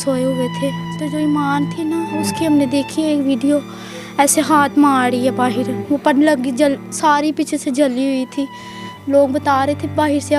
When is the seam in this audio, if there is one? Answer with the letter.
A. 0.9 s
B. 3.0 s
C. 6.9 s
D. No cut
A